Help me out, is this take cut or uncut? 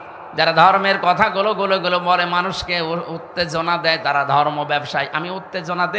uncut